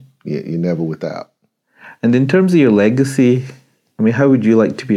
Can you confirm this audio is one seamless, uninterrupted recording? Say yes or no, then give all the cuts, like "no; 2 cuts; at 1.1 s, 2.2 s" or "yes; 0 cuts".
yes; 0 cuts